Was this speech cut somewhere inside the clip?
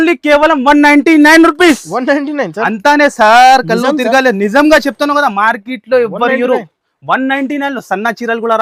no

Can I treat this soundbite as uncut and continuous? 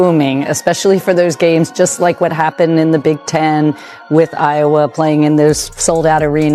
yes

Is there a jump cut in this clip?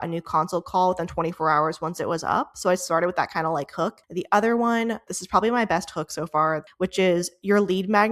yes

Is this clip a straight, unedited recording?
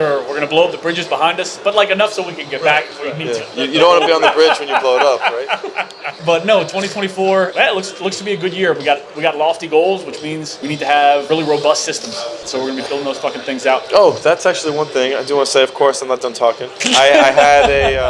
yes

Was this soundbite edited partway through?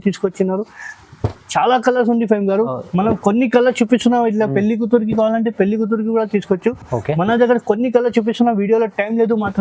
no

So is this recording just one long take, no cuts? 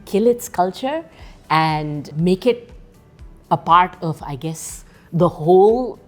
no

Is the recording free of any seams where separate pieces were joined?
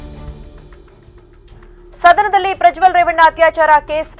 no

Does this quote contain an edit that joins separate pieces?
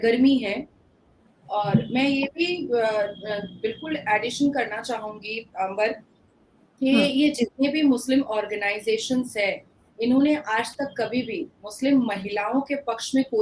no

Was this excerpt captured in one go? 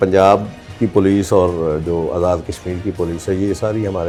yes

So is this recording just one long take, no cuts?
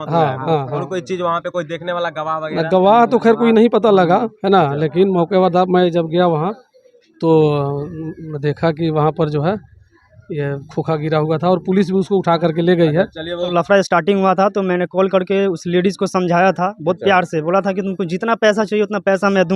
no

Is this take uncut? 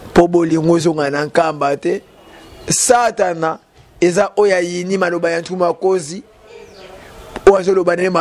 yes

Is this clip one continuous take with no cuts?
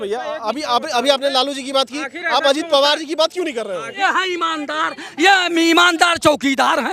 no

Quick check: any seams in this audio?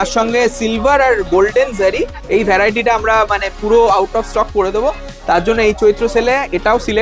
yes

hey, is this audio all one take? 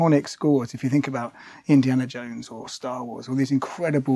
yes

